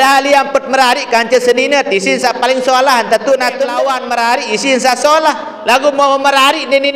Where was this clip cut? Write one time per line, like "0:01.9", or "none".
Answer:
0:03.7